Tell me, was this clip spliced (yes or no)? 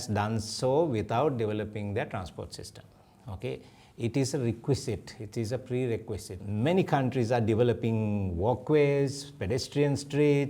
yes